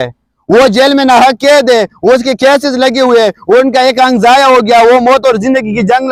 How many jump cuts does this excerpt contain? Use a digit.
0